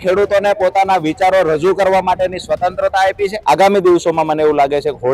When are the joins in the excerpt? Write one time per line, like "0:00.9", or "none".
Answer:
0:03.4